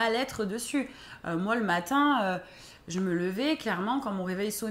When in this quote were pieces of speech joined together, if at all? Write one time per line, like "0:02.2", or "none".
none